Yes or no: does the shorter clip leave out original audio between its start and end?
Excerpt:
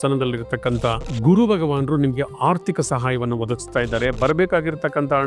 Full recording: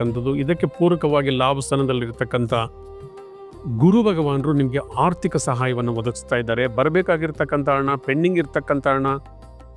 yes